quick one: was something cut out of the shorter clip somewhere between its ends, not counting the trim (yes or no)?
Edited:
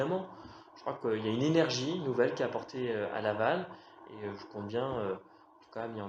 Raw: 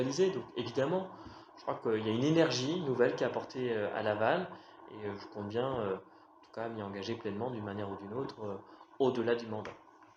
no